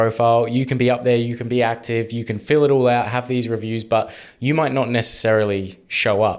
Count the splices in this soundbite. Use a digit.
0